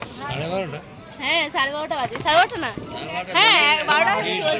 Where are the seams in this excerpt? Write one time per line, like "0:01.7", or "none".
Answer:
none